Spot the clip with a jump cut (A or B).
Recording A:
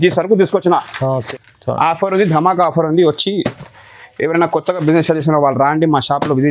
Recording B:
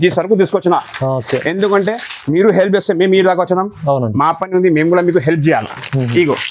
A